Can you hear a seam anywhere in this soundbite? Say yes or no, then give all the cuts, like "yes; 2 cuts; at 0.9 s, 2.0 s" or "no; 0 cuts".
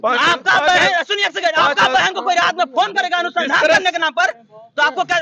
no; 0 cuts